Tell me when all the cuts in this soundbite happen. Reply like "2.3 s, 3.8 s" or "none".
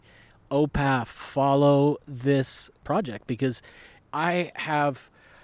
2.8 s, 3.9 s

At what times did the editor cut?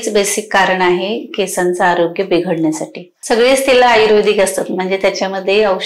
3.1 s

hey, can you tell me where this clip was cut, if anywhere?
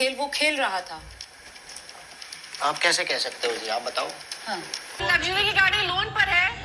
5.0 s

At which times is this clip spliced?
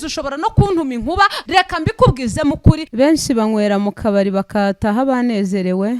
1.4 s, 2.9 s

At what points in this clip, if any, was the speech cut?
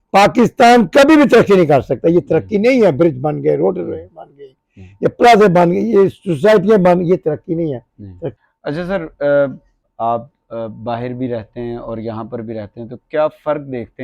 8.3 s, 9.8 s

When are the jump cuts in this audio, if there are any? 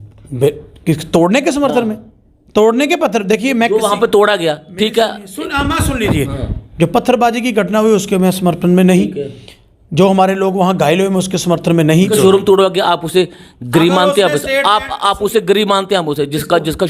12.1 s

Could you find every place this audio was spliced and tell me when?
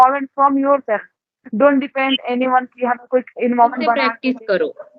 4.1 s

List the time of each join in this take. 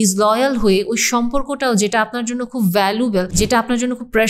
3.3 s

